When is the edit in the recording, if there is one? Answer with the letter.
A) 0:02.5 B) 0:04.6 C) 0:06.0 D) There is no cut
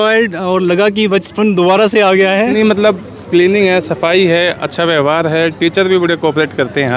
A